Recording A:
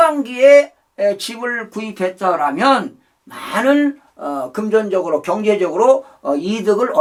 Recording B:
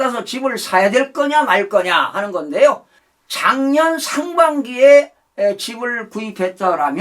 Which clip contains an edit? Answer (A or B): B